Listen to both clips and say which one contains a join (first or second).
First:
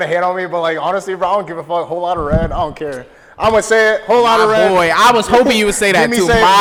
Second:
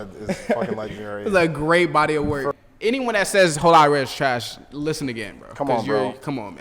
second